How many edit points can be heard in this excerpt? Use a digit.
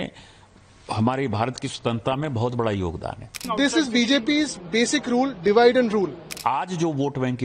2